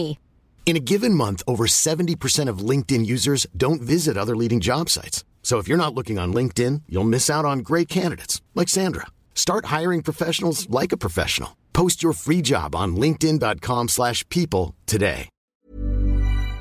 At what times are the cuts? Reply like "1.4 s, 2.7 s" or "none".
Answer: 15.4 s